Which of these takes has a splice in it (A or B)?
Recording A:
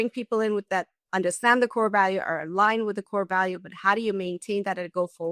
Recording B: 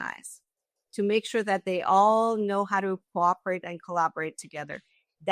A